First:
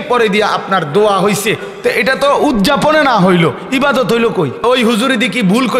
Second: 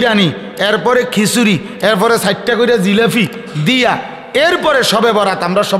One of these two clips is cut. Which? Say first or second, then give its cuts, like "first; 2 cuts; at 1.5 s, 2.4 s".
first; 1 cut; at 4.6 s